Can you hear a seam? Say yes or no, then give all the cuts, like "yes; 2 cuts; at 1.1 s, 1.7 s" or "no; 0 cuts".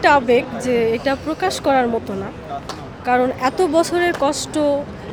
no; 0 cuts